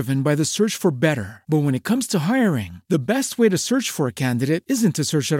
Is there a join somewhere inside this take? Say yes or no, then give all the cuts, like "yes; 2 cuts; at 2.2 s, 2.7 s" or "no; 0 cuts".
no; 0 cuts